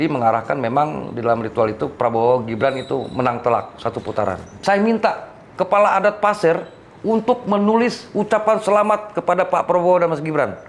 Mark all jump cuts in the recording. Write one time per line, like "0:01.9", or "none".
0:04.6